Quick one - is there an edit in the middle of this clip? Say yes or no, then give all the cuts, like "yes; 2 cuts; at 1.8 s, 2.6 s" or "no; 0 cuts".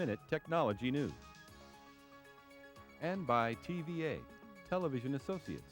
yes; 2 cuts; at 1.2 s, 3.0 s